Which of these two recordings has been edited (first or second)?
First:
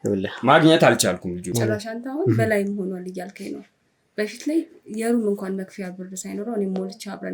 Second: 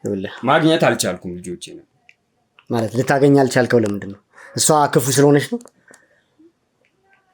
first